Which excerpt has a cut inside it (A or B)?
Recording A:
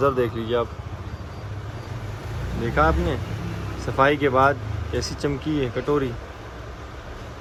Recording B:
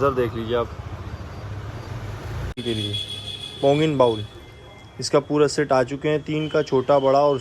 B